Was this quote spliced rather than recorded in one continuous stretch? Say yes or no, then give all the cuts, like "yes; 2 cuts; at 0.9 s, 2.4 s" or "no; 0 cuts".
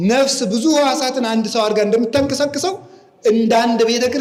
no; 0 cuts